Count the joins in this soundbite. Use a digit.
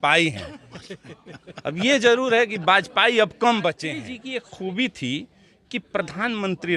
1